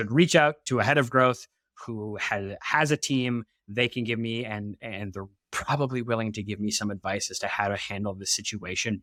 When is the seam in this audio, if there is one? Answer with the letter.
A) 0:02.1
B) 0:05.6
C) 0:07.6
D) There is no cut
D